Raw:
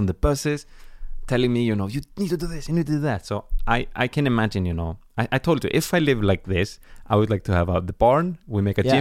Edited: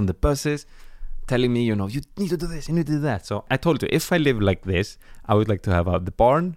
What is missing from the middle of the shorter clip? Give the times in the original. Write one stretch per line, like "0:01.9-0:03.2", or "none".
0:03.5-0:05.3